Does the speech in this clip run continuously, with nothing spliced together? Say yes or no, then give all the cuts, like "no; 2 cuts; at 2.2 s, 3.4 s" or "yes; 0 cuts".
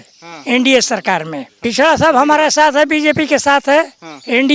no; 1 cut; at 1.4 s